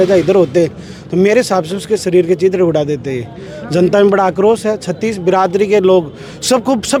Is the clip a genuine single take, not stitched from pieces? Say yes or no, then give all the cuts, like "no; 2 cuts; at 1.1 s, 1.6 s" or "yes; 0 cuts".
yes; 0 cuts